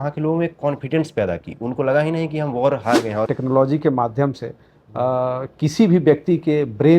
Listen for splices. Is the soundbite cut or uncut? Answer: cut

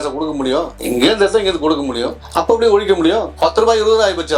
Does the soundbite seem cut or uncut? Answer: cut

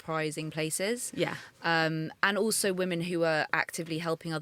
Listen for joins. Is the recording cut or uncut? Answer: uncut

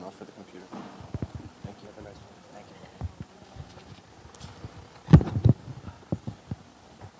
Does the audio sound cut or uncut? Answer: cut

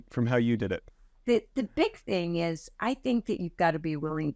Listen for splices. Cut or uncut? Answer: cut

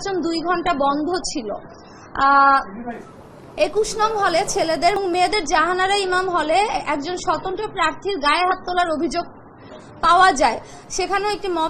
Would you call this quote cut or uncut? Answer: cut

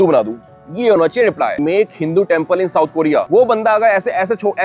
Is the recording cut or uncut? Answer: cut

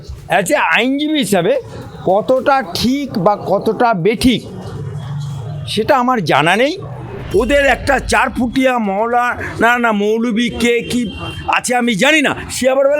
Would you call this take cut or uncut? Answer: cut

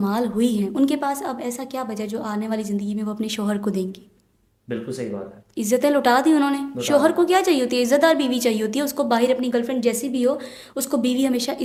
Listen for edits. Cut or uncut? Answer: uncut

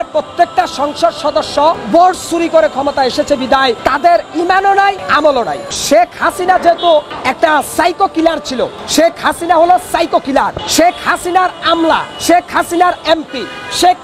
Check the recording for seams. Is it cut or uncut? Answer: cut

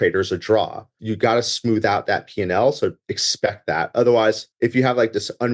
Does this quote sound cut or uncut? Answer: cut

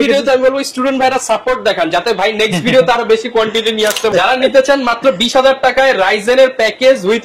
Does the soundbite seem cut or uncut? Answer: cut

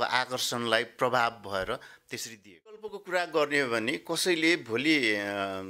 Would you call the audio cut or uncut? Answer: cut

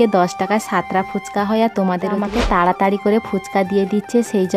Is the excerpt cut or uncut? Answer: cut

